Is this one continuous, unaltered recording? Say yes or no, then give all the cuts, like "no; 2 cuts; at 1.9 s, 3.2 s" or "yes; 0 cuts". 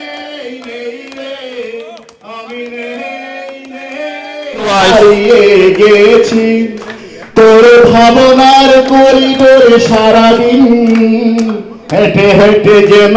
no; 1 cut; at 4.7 s